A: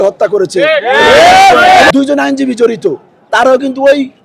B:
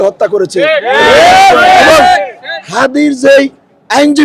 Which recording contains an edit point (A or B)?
A